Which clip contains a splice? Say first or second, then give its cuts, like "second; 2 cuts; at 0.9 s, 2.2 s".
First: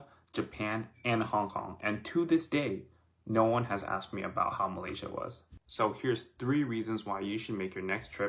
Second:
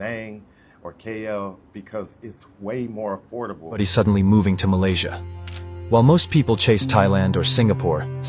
second; 1 cut; at 3.8 s